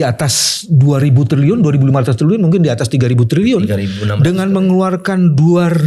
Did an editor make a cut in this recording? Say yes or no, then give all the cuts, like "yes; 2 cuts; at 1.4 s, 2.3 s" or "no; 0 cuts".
no; 0 cuts